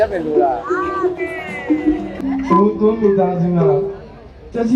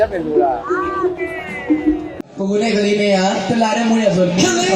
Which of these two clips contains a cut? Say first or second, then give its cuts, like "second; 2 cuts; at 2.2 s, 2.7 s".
first; 1 cut; at 2.2 s